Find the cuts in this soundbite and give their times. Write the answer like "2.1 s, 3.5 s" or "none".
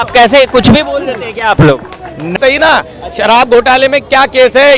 2.4 s